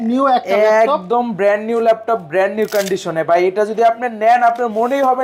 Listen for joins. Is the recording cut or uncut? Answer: uncut